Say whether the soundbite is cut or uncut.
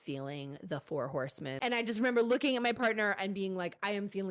cut